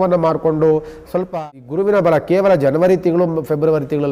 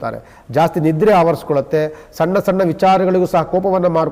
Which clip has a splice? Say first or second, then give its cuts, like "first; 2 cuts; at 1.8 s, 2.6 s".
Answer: first; 1 cut; at 1.4 s